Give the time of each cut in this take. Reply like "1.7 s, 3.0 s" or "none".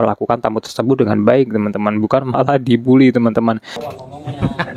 3.7 s